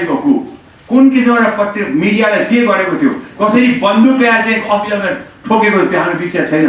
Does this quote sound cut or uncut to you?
uncut